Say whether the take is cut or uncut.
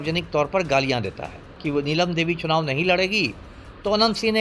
cut